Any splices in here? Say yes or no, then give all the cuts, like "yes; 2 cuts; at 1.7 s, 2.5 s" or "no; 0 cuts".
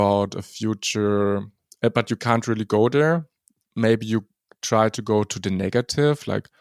no; 0 cuts